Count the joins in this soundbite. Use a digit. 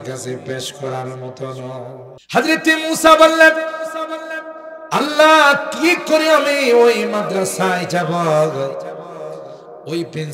1